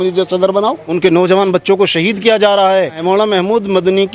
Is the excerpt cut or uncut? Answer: cut